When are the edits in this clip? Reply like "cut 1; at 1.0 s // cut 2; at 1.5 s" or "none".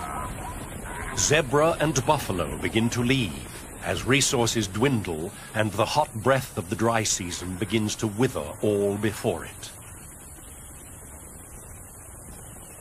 none